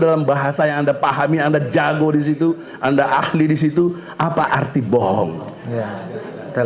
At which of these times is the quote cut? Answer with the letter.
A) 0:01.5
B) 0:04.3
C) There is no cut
C